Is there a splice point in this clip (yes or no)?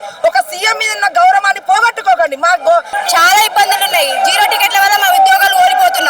yes